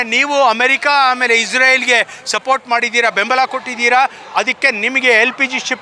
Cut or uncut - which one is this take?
uncut